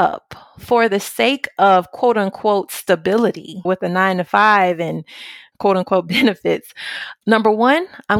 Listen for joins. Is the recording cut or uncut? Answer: cut